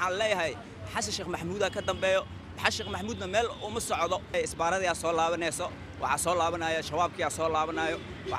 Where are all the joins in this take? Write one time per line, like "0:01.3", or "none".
0:04.3